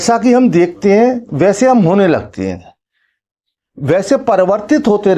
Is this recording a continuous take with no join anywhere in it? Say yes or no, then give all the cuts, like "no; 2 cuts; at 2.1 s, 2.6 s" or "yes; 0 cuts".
yes; 0 cuts